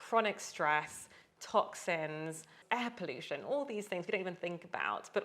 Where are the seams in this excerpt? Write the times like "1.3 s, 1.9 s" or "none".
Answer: 2.5 s